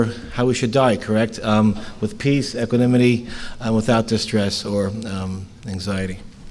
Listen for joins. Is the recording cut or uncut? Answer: cut